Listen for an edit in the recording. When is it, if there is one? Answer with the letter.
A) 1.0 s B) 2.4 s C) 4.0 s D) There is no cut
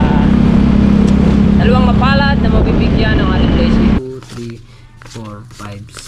C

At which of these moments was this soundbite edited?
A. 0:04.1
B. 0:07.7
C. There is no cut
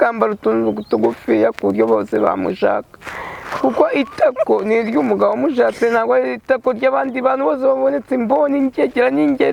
C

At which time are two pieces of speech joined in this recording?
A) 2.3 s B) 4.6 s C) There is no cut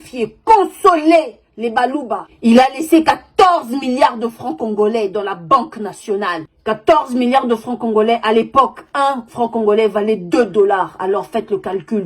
A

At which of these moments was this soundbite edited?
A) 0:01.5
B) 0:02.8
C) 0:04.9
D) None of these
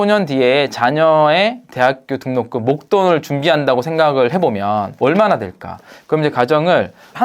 C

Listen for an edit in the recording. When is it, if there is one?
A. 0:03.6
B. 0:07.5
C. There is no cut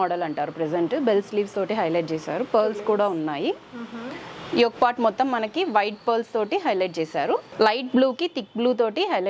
B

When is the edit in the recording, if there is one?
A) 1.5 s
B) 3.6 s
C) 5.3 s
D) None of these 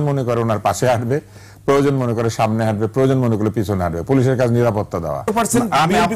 C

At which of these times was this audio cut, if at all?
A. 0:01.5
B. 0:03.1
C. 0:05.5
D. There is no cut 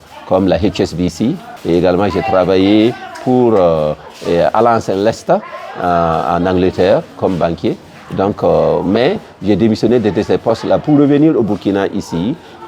A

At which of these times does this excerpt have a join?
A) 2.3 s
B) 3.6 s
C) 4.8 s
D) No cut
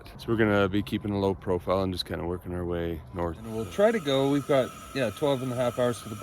B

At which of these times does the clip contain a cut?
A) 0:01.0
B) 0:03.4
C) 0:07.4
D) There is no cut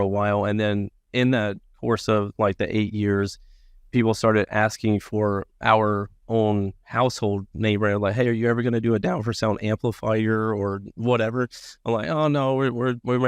D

